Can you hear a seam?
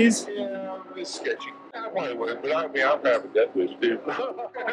no; 0 cuts

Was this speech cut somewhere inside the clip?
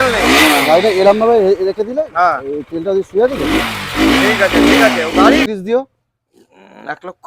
yes; 1 cut; at 5.5 s

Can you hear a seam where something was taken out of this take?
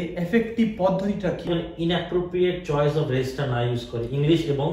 yes; 1 cut; at 1.5 s

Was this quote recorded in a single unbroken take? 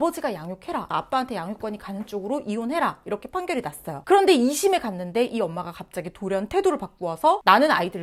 yes; 0 cuts

